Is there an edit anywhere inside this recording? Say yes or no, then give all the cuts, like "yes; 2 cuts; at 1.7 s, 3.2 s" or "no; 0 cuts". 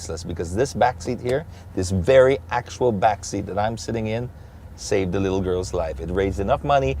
no; 0 cuts